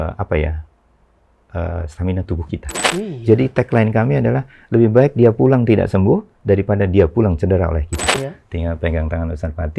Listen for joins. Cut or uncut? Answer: cut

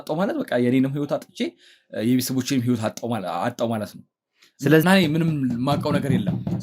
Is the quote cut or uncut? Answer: cut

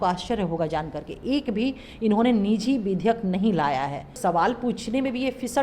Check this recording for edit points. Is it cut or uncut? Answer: cut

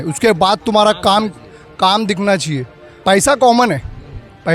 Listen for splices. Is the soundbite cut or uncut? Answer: cut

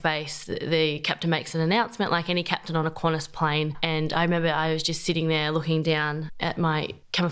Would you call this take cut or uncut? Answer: uncut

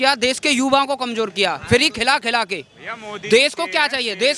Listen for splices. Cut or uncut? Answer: uncut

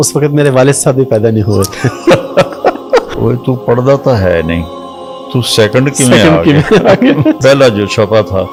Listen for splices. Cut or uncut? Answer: uncut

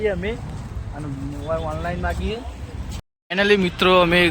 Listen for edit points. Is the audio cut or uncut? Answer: cut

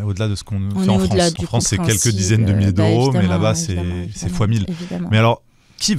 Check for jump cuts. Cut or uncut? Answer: cut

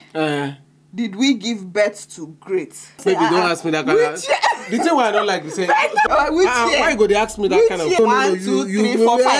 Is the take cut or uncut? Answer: cut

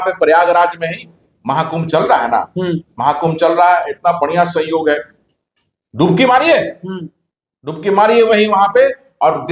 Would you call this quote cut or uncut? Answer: uncut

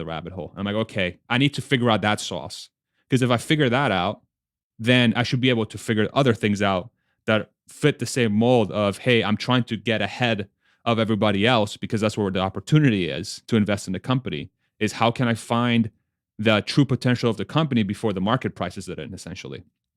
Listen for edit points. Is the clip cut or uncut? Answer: uncut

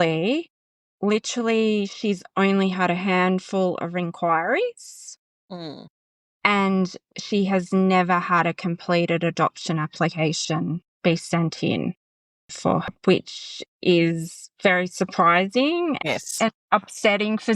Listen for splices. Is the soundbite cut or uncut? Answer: cut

